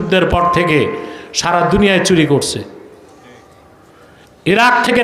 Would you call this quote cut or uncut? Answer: uncut